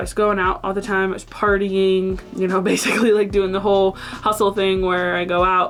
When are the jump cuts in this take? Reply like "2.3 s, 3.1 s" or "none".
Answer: none